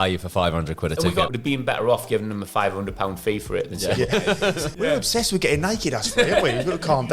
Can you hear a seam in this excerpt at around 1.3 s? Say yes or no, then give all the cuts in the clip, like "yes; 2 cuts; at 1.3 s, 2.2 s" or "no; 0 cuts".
yes; 2 cuts; at 1.3 s, 4.6 s